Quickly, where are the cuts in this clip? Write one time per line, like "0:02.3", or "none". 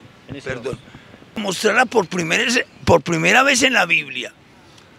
0:01.4